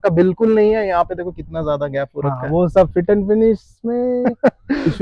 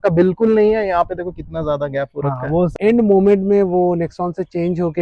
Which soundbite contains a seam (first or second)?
second